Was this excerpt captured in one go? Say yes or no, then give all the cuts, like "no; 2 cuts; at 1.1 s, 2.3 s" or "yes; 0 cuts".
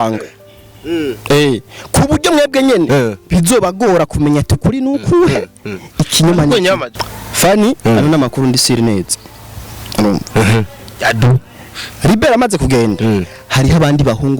no; 1 cut; at 6.9 s